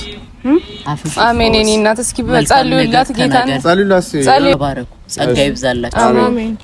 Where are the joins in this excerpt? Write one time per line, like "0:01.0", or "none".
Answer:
0:04.5